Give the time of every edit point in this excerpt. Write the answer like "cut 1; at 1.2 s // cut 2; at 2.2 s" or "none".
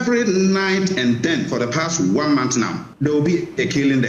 cut 1; at 2.8 s